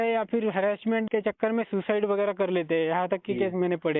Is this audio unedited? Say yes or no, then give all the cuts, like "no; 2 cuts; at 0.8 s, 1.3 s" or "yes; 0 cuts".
no; 1 cut; at 1.1 s